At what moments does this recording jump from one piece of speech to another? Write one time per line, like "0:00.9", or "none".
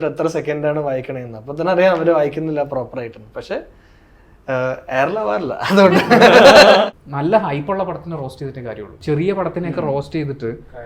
0:06.8
0:08.9